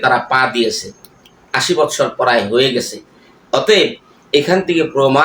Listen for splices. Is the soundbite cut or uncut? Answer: uncut